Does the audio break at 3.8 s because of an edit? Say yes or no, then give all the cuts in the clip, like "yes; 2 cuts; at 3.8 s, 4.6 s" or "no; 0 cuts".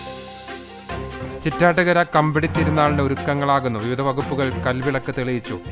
no; 1 cut; at 1.4 s